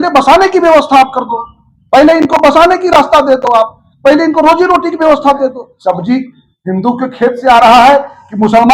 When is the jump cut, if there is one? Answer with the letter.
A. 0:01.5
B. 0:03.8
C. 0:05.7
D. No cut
C